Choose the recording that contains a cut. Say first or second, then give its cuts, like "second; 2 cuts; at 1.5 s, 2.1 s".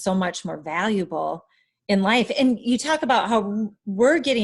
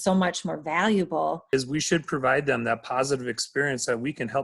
second; 1 cut; at 1.4 s